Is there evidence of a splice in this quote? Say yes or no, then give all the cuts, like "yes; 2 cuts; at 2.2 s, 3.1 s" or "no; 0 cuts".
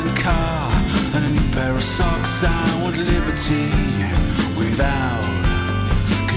no; 0 cuts